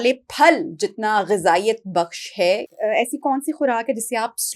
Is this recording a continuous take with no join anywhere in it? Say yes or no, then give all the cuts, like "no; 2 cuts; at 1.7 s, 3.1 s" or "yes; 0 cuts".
no; 1 cut; at 2.7 s